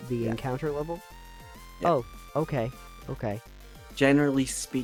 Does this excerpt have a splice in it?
no; 0 cuts

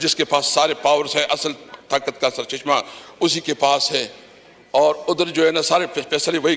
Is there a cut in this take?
no; 0 cuts

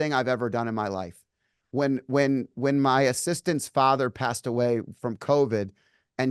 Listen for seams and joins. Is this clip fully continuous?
yes; 0 cuts

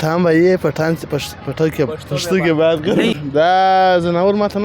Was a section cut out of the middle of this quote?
yes; 1 cut; at 3.2 s

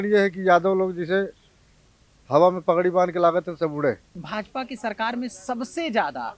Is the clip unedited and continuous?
no; 1 cut; at 4.1 s

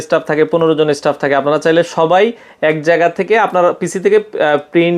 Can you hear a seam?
no; 0 cuts

